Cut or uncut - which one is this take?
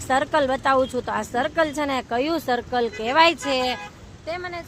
uncut